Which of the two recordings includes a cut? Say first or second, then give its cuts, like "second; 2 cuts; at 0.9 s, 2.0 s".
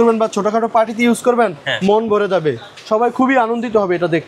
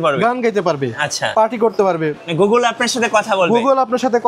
second; 1 cut; at 2.2 s